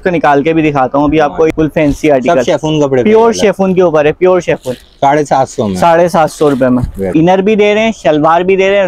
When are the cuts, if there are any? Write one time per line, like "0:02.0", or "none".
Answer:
0:01.5
0:07.0